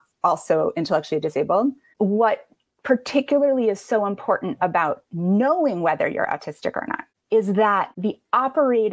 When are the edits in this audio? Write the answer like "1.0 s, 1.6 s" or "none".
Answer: 1.8 s, 7.9 s